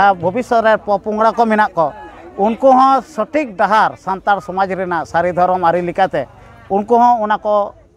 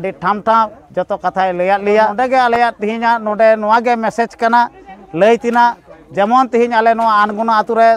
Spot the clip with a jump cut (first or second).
second